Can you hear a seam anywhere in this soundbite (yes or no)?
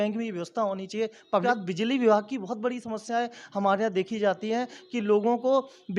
yes